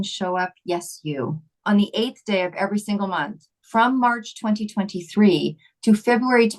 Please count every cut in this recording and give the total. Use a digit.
1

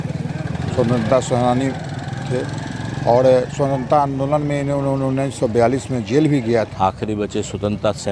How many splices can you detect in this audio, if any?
1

